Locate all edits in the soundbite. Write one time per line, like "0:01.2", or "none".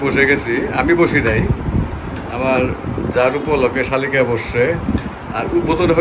none